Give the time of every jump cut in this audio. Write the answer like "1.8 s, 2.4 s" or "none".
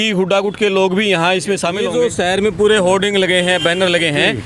1.8 s